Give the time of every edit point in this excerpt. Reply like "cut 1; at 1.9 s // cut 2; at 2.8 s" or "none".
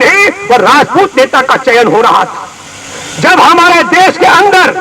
none